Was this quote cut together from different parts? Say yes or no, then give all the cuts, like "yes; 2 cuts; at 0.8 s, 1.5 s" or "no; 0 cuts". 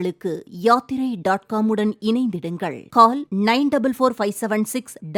no; 0 cuts